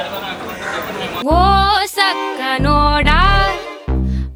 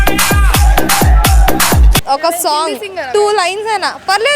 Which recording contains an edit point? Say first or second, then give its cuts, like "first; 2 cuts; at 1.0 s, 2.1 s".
second; 1 cut; at 2.0 s